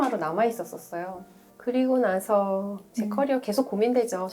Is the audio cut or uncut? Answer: cut